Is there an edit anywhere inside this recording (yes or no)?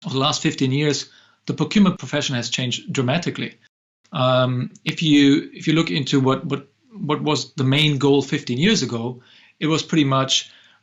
yes